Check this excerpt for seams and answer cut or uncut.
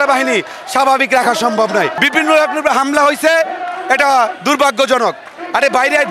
cut